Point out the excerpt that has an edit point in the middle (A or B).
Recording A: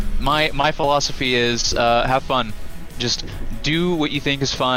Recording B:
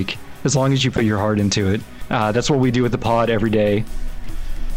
B